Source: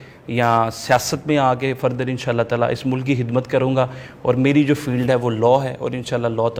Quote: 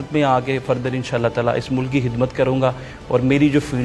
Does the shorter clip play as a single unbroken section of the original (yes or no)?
yes